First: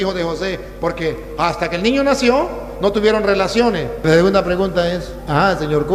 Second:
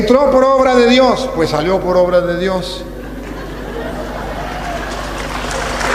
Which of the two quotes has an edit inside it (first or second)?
first